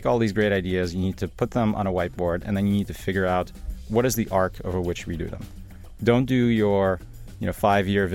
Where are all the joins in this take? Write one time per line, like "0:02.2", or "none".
0:03.9